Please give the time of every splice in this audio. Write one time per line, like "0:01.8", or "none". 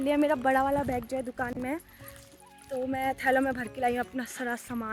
none